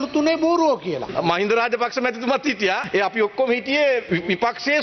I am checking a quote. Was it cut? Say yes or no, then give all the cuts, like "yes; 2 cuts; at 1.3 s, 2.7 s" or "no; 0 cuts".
yes; 3 cuts; at 1.0 s, 2.8 s, 4.0 s